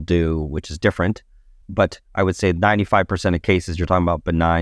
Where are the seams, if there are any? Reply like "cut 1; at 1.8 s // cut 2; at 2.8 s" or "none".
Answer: none